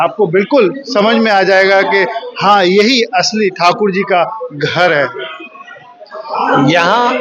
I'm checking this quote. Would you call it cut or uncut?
uncut